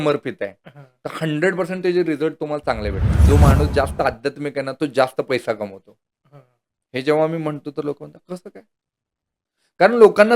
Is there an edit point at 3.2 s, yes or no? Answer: yes